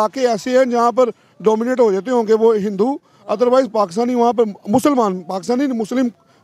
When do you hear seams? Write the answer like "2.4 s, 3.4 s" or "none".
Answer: none